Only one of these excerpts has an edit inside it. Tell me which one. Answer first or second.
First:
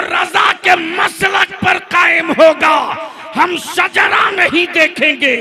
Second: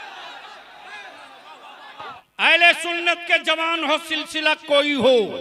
second